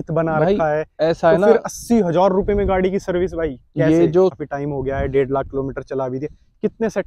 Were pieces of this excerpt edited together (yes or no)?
yes